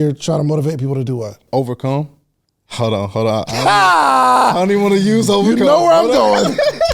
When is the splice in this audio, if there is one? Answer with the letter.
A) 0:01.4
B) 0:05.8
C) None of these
A